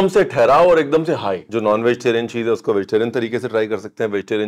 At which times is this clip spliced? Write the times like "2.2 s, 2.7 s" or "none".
1.4 s